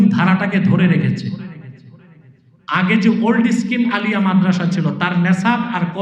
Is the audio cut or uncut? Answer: uncut